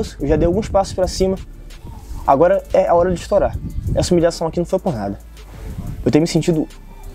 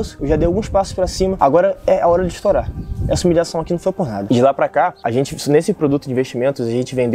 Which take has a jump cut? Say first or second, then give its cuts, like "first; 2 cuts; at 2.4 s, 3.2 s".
second; 3 cuts; at 1.4 s, 4.2 s, 5.0 s